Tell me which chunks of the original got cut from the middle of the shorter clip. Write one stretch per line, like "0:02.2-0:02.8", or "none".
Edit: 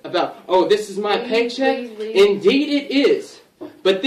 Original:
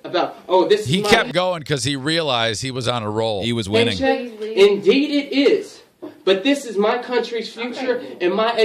0:01.1-0:03.5